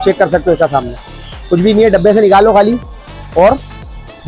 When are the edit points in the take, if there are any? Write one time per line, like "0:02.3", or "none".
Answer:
none

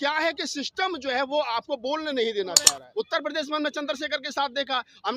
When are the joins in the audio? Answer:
0:02.8

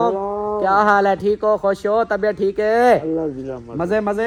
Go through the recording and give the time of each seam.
none

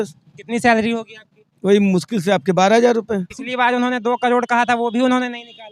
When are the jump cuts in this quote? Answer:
0:03.4

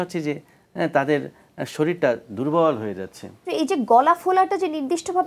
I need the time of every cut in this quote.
0:03.4

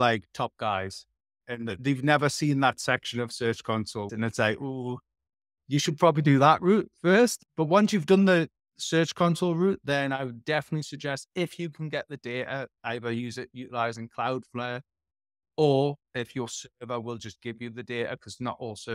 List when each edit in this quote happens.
0:04.1
0:07.4

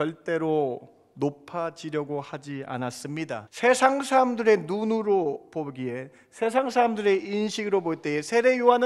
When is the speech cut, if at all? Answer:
0:03.5

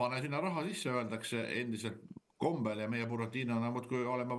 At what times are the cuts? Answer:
none

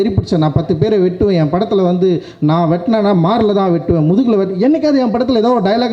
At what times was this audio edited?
none

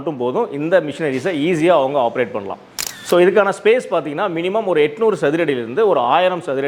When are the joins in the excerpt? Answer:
none

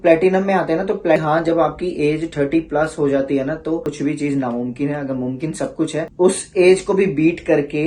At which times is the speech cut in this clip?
0:01.2
0:03.9
0:06.0

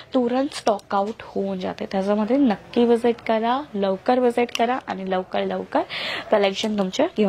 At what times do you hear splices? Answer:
none

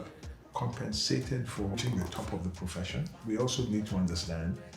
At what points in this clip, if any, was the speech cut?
0:01.8
0:03.2

